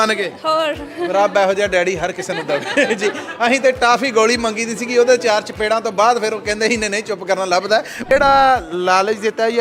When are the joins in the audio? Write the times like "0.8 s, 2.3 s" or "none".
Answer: 8.1 s

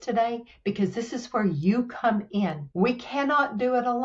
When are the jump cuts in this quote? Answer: 2.6 s

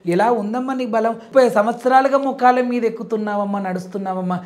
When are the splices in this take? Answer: 1.2 s

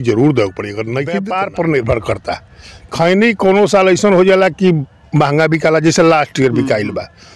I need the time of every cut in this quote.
1.2 s

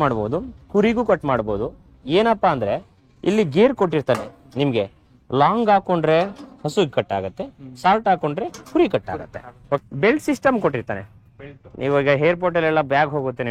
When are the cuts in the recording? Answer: 9.8 s

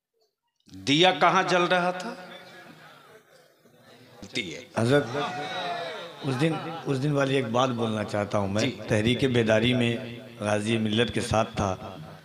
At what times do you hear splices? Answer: 4.3 s

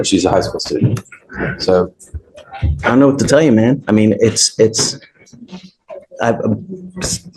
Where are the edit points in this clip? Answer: none

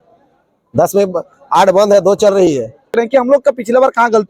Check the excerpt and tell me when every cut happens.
2.9 s

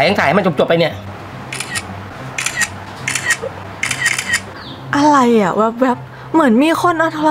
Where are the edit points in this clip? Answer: 4.6 s

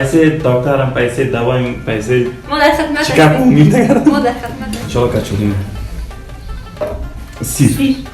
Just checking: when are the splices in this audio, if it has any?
4.5 s

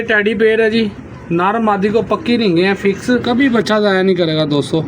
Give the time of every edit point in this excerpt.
3.2 s

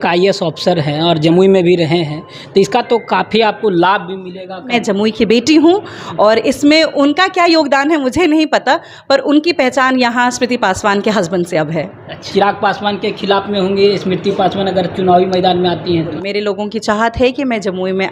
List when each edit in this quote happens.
4.7 s, 12.3 s, 16.1 s

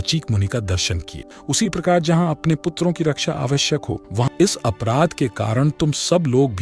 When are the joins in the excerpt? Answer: 1.3 s, 4.2 s

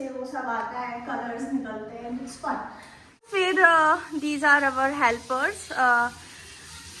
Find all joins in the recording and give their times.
3.3 s

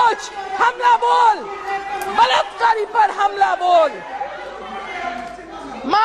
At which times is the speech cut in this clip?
none

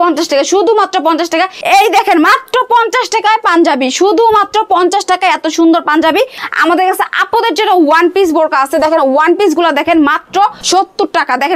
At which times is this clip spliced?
1.6 s, 6.4 s, 10.6 s

